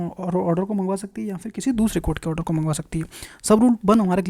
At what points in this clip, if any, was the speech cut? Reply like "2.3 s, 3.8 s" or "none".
none